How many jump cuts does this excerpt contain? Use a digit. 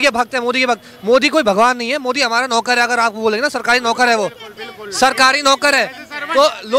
0